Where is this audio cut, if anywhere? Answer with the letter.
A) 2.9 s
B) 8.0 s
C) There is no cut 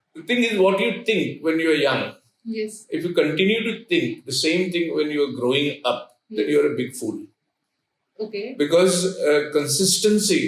C